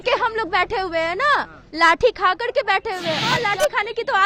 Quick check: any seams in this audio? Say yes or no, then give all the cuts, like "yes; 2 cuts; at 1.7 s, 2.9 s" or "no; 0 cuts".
yes; 1 cut; at 3.3 s